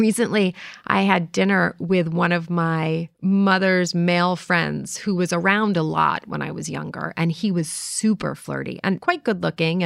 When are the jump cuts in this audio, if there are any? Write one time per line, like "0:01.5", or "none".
0:03.1
0:09.0